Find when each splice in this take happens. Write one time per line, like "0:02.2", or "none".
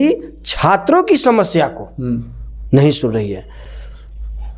none